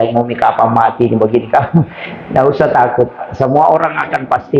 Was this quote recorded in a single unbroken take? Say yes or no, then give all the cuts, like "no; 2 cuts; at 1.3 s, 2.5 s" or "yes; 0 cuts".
yes; 0 cuts